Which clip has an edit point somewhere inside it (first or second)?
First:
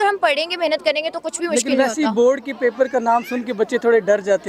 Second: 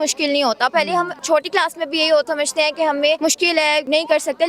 second